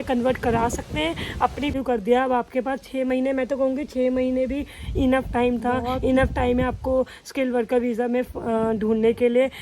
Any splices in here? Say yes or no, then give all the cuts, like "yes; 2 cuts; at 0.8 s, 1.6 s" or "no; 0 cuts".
yes; 1 cut; at 1.7 s